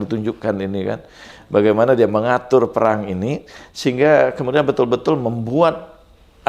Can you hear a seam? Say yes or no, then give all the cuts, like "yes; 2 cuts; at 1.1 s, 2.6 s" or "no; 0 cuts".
no; 0 cuts